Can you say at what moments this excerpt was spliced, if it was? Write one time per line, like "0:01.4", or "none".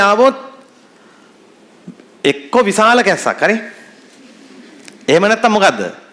none